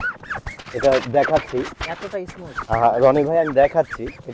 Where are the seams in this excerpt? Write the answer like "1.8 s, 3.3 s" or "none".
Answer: none